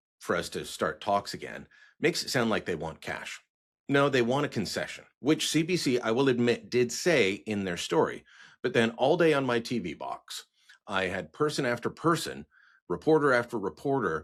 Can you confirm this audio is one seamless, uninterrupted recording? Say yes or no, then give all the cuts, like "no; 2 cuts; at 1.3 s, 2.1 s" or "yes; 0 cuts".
yes; 0 cuts